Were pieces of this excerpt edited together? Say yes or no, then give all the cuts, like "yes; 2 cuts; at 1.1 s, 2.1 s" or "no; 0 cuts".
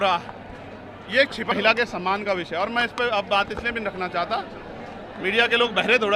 yes; 1 cut; at 1.5 s